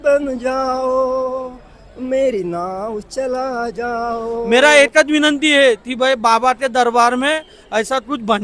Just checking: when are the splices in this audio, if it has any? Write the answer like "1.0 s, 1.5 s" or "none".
4.5 s